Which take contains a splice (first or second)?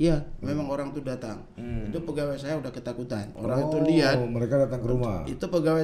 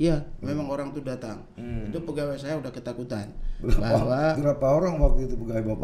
first